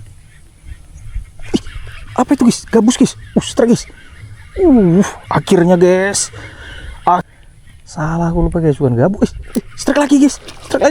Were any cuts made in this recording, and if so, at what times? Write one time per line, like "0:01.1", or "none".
0:07.3

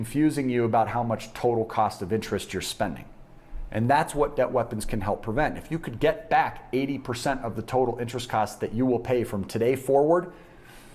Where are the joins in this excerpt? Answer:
none

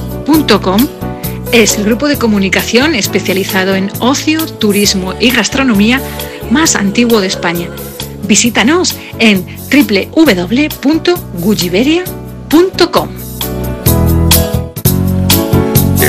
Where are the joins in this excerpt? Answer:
0:14.8

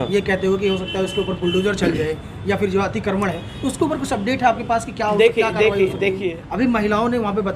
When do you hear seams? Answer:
0:06.4

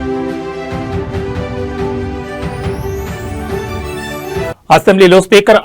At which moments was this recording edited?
0:03.8

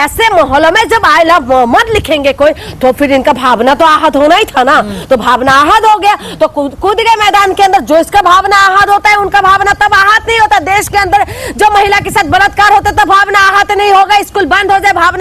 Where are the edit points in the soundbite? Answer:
none

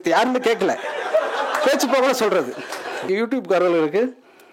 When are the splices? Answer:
0:03.1

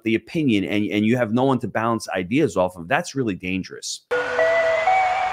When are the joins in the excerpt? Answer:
0:03.9

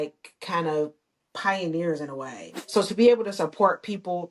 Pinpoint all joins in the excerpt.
0:02.5

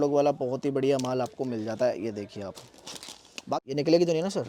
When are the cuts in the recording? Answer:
0:03.5

